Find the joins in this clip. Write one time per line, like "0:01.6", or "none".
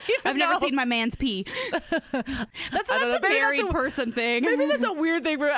0:02.5